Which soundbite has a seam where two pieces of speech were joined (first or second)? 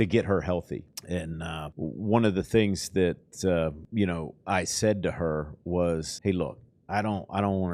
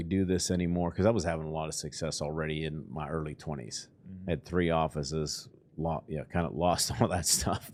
first